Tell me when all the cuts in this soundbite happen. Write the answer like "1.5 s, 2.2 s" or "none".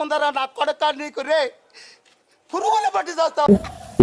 none

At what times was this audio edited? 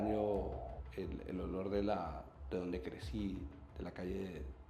none

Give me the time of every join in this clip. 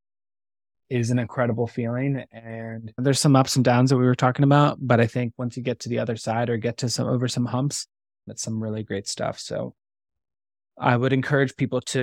2.9 s

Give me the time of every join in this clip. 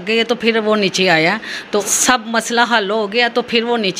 1.8 s

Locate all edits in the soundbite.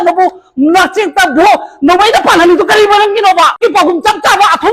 3.6 s

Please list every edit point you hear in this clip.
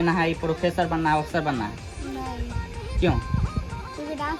none

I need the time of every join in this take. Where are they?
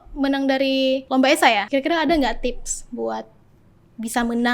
1.0 s, 1.7 s

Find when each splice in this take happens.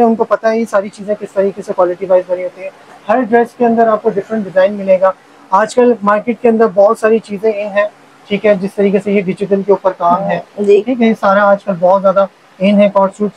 none

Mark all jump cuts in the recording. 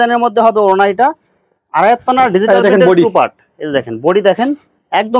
none

